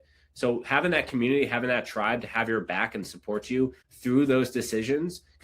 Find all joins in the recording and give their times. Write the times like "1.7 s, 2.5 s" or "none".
3.9 s